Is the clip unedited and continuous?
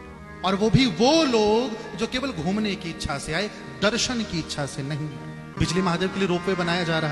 no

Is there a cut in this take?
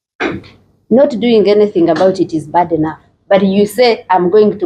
no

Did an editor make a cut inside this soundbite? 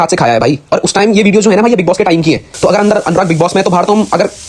yes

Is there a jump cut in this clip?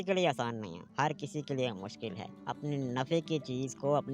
yes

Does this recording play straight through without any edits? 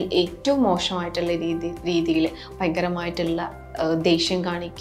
yes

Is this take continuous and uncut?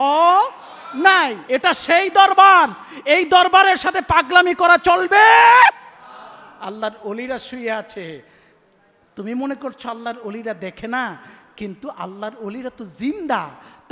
no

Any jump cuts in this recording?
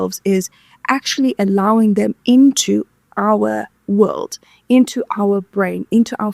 no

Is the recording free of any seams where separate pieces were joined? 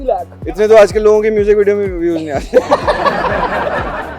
yes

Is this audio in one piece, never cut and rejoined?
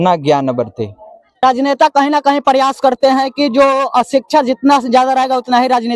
no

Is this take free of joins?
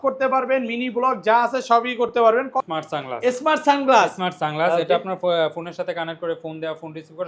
no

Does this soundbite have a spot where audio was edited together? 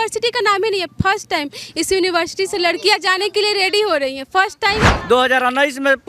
yes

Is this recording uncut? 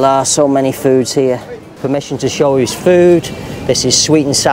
no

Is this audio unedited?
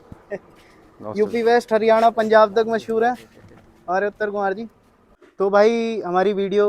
yes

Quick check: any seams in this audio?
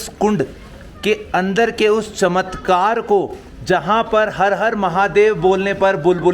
no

